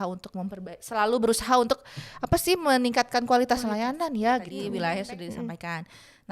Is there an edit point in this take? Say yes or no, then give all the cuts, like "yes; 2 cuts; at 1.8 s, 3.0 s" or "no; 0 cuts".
yes; 1 cut; at 4.6 s